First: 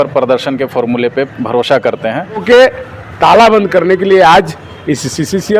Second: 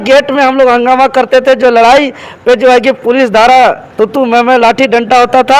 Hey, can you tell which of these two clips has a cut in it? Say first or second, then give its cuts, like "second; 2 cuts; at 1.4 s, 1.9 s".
first; 1 cut; at 2.4 s